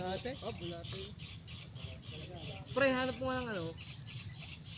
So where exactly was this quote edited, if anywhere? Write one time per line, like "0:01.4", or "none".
none